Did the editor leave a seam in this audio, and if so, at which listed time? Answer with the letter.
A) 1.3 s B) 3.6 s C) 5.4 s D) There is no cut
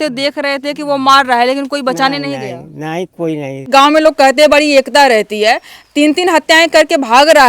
B